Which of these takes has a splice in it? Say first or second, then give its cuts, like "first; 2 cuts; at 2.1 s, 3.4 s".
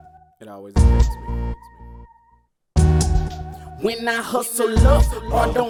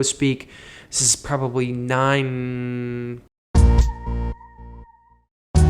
second; 1 cut; at 3.1 s